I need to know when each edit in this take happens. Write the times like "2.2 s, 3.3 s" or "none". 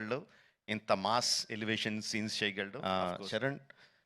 2.7 s